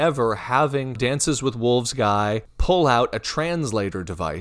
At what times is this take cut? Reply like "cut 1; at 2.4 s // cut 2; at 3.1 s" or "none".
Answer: cut 1; at 0.9 s // cut 2; at 2.5 s

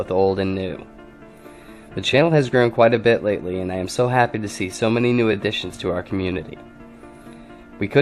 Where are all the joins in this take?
cut 1; at 4.3 s

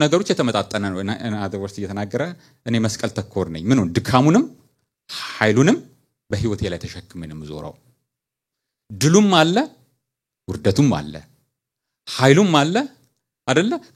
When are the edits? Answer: none

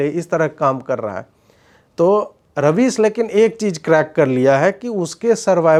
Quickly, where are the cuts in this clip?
none

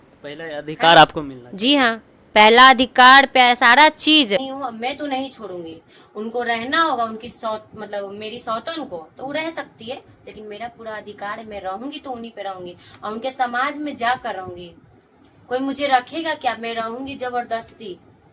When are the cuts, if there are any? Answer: cut 1; at 4.5 s

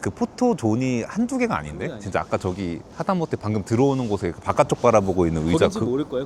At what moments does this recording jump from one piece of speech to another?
none

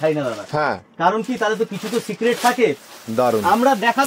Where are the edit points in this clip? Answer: cut 1; at 2.8 s

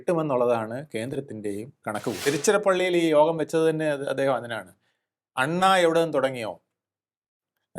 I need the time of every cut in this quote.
cut 1; at 2.2 s

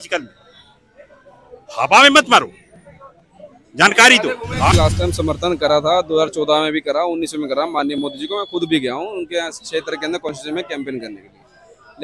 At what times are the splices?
cut 1; at 4.7 s

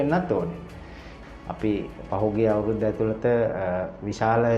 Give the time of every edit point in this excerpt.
cut 1; at 1.1 s

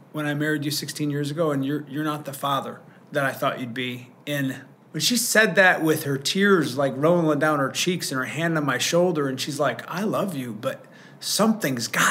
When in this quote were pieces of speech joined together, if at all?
cut 1; at 4.7 s

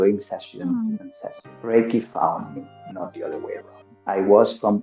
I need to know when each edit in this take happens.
cut 1; at 1.5 s // cut 2; at 3.9 s

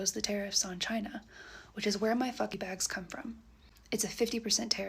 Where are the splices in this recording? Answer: cut 1; at 2.5 s

